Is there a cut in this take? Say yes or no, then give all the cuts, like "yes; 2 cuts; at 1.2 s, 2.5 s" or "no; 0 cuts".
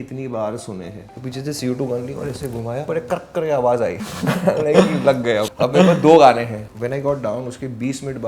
yes; 5 cuts; at 1.0 s, 2.9 s, 4.1 s, 5.5 s, 6.6 s